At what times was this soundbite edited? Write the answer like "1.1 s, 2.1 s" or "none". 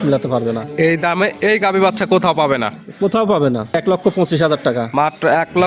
3.7 s